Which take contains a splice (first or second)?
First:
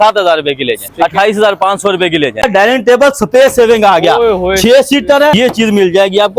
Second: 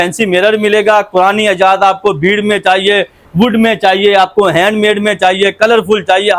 first